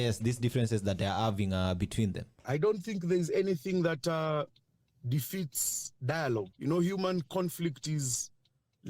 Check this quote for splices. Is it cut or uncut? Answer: cut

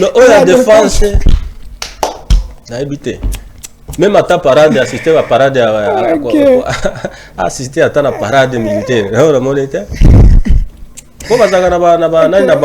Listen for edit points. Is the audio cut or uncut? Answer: uncut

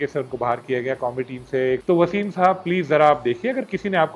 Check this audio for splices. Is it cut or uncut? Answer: cut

